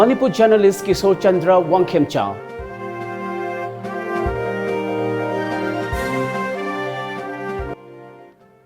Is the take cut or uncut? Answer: cut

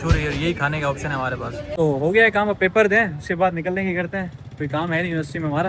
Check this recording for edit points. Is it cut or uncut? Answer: cut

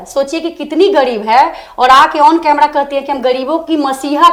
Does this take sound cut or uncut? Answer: uncut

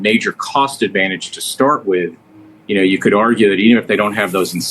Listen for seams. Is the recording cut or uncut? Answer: uncut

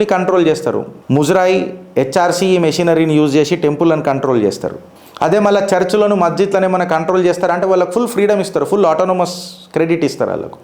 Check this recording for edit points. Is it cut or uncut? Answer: cut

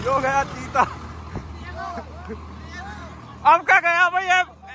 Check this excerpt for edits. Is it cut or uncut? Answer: uncut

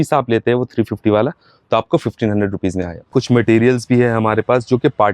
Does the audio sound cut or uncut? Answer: cut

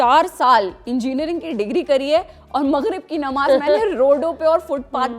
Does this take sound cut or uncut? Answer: uncut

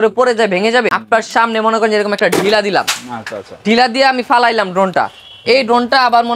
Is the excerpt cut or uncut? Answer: cut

